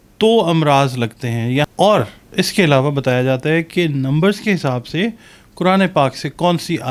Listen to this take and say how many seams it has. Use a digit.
1